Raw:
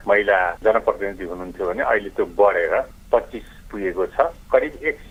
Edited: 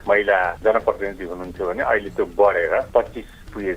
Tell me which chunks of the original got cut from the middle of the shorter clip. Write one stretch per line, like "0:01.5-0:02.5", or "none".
0:02.9-0:03.1